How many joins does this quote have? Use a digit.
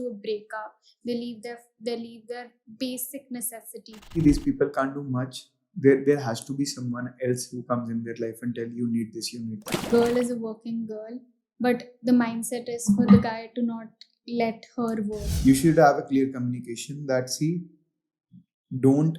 3